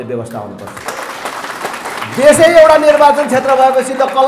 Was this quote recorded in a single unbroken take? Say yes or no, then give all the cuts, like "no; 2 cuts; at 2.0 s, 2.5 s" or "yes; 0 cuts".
yes; 0 cuts